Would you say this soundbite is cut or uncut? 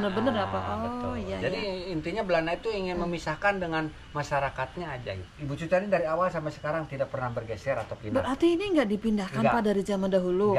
cut